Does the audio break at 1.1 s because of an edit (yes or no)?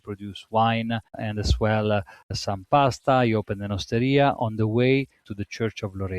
yes